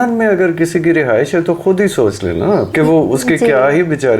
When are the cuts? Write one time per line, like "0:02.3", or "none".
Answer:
0:02.7